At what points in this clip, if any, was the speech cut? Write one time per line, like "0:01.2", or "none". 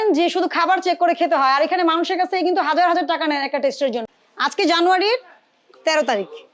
0:04.2
0:05.6

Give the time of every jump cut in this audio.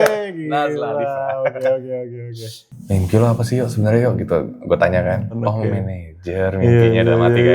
0:02.6
0:05.4

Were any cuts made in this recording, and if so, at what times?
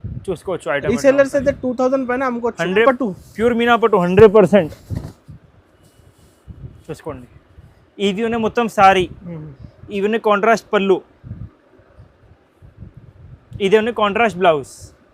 0:02.8

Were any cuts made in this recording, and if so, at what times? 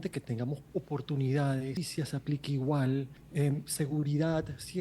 0:01.7
0:03.2

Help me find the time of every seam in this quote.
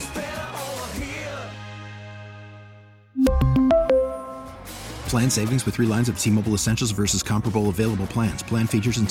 none

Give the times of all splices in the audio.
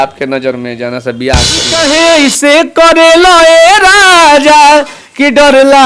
0:01.7

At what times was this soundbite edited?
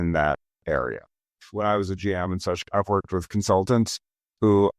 0:01.4
0:03.3

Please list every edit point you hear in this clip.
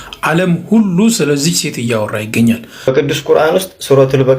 0:02.7

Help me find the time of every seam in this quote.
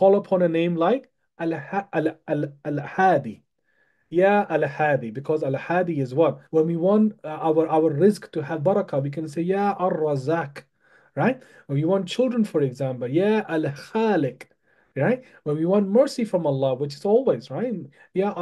0:06.4

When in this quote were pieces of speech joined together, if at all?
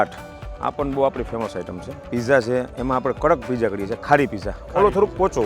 0:02.1

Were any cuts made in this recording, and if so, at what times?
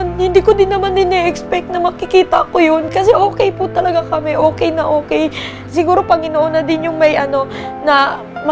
0:02.9
0:05.6

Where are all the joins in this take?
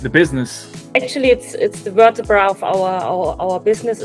0:00.9

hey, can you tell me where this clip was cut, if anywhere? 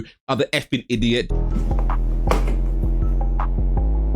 0:01.3

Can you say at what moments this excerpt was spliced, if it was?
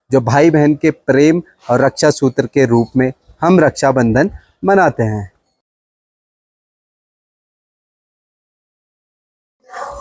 none

